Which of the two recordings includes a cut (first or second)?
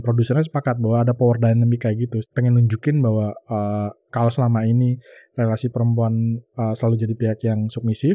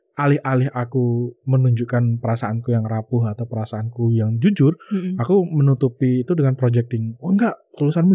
first